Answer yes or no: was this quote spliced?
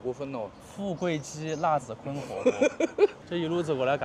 no